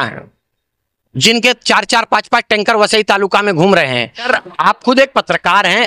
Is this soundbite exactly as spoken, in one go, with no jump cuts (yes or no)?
no